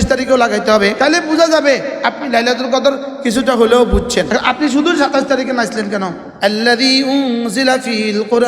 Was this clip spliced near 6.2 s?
yes; 3 cuts; at 1.0 s, 4.3 s, 6.2 s

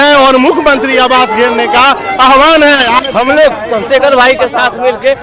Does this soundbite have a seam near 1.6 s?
no; 1 cut; at 3.0 s

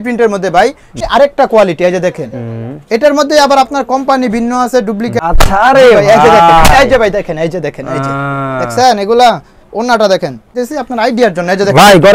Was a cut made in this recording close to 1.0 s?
yes; 3 cuts; at 1.0 s, 5.2 s, 10.6 s

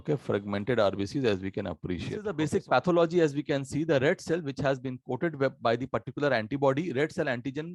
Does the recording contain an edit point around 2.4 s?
yes; 1 cut; at 2.4 s

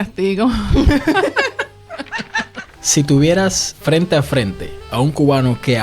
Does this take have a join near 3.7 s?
yes; 2 cuts; at 2.8 s, 3.7 s

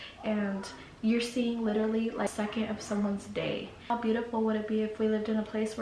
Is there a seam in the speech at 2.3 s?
yes; 2 cuts; at 2.3 s, 3.9 s

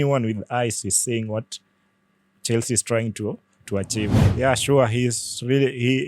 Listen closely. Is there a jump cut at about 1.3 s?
no; 1 cut; at 4.2 s

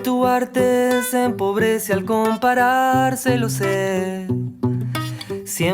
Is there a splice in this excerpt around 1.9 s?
no; 1 cut; at 3.9 s

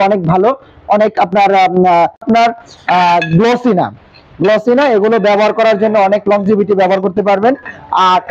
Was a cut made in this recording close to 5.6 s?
no; 1 cut; at 2.2 s

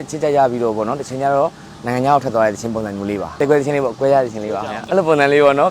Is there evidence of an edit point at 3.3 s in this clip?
yes; 2 cuts; at 3.3 s, 4.6 s

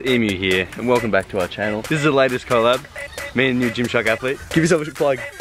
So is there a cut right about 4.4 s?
yes; 2 cuts; at 1.8 s, 4.4 s

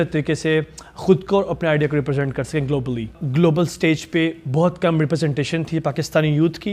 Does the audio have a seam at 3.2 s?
yes; 1 cut; at 3.2 s

